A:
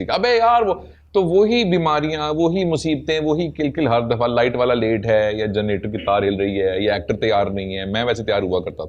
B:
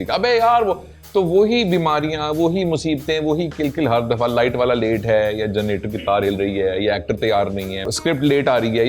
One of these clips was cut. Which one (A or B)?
B